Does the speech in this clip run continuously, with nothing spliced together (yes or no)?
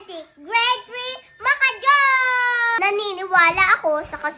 no